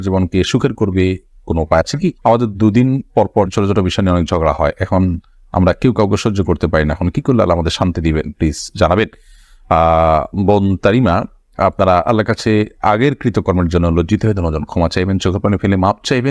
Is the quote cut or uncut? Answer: uncut